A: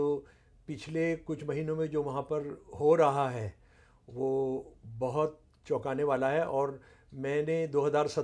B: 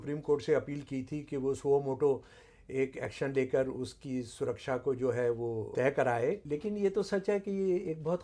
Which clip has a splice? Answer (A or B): B